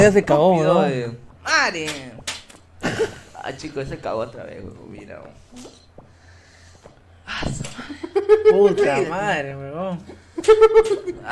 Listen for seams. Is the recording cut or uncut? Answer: cut